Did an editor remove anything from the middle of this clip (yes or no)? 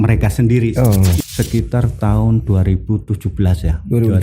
yes